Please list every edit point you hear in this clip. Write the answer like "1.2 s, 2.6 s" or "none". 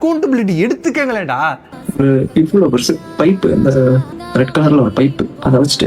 1.7 s, 4.2 s